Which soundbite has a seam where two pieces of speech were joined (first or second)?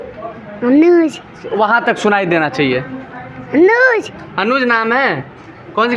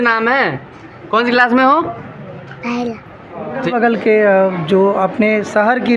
second